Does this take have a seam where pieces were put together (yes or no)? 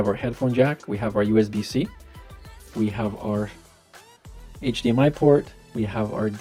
no